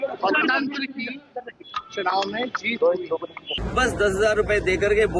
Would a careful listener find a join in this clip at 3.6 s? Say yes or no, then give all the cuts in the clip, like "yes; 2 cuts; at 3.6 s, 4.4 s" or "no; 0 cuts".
yes; 1 cut; at 3.6 s